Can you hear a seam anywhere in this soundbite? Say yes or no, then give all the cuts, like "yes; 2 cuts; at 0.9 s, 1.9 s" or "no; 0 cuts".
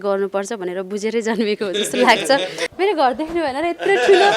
yes; 1 cut; at 2.6 s